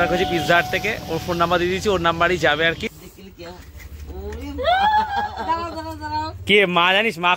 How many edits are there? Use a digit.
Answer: 1